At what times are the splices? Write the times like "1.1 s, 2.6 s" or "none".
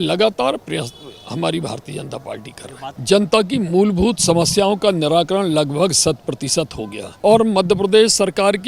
3.0 s, 7.0 s